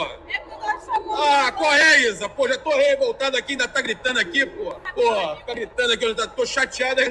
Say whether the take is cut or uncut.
cut